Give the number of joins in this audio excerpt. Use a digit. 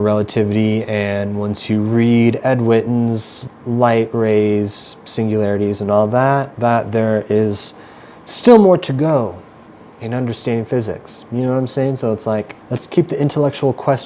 0